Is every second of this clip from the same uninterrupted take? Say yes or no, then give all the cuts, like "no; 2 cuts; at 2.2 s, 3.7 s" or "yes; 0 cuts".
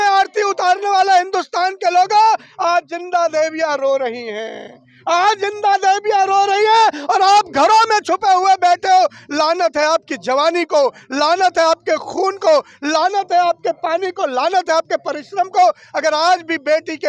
yes; 0 cuts